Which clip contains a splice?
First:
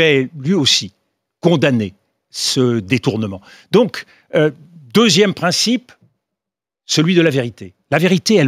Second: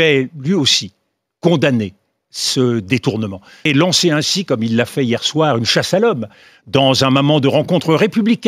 second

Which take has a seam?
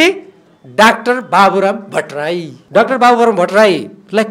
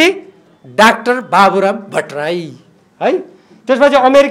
first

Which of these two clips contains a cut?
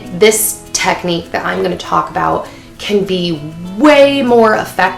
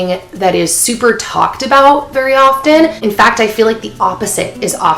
second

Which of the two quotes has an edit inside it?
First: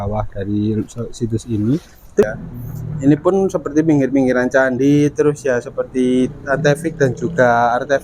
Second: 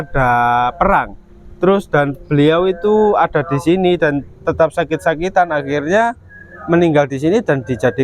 first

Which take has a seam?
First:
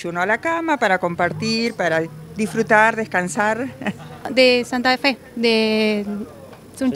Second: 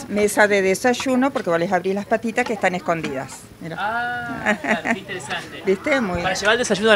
first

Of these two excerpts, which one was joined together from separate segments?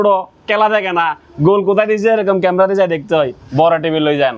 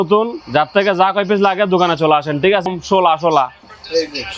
second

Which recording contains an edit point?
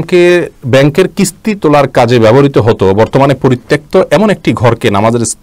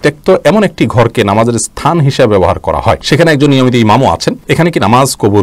second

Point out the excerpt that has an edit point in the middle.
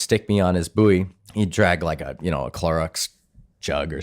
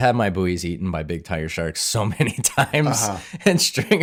first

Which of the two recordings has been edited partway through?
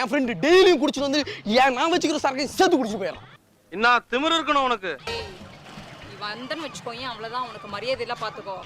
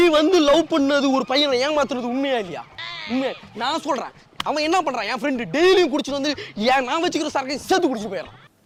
first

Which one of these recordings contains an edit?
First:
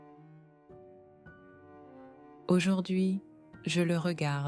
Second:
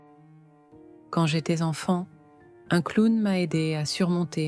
second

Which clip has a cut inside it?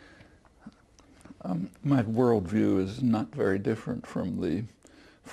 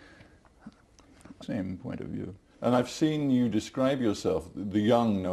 first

